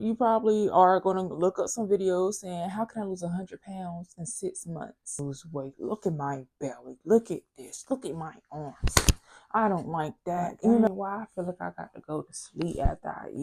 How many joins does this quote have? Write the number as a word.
two